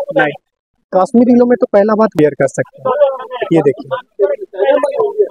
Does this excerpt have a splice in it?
yes; 1 cut; at 2.1 s

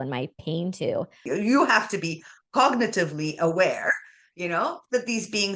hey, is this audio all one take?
no; 1 cut; at 1.2 s

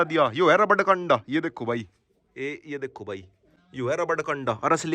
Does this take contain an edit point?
no; 0 cuts

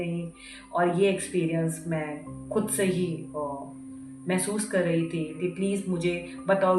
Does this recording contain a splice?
yes; 1 cut; at 5.3 s

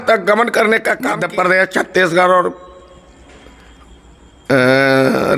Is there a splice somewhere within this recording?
yes; 1 cut; at 1.2 s

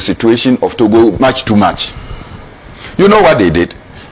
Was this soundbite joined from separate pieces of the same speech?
no; 0 cuts

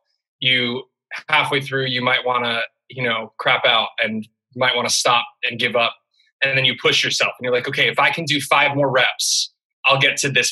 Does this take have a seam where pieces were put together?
no; 0 cuts

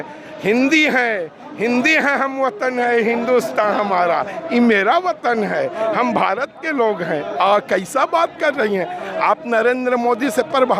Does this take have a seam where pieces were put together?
no; 0 cuts

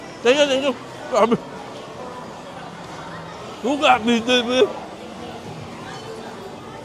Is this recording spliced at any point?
no; 0 cuts

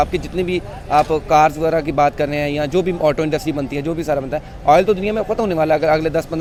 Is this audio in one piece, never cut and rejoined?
yes; 0 cuts

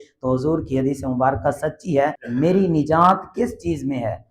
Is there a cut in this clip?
yes; 1 cut; at 2.2 s

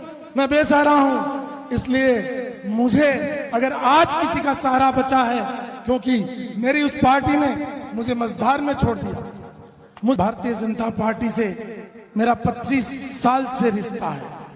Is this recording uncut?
no; 1 cut; at 10.2 s

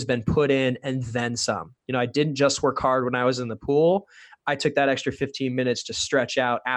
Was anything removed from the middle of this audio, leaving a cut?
no; 0 cuts

